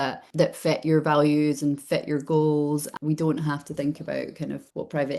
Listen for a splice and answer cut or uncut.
cut